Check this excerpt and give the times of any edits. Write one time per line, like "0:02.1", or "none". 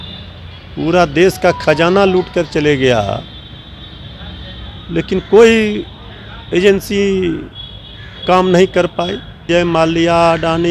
0:09.3

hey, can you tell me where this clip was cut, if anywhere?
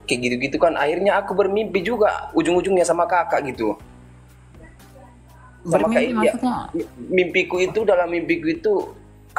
none

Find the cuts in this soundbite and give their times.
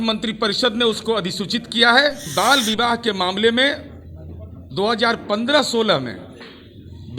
0:02.2

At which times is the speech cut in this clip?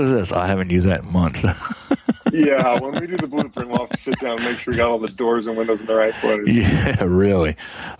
none

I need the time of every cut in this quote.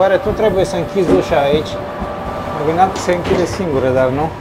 0:02.5

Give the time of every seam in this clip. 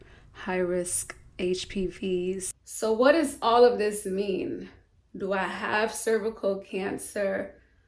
0:02.5

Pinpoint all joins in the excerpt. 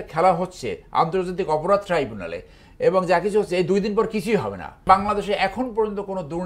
0:04.8

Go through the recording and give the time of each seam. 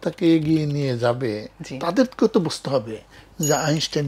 none

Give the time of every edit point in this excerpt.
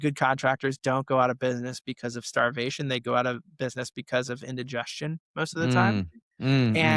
none

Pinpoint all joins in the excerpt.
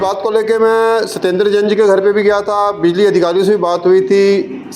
none

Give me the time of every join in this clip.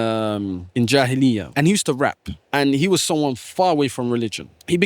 0:01.5

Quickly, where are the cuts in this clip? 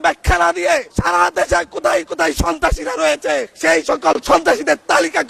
0:00.9
0:03.5

